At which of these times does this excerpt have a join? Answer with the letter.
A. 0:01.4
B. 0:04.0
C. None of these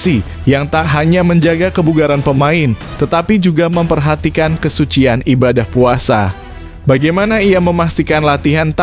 C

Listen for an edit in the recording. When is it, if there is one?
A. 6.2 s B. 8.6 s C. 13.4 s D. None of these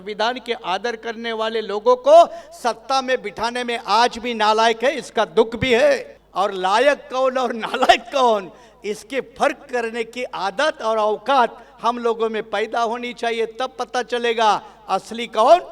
A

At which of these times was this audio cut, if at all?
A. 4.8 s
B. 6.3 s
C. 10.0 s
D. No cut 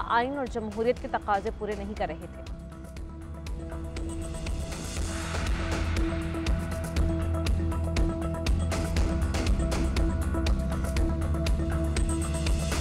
D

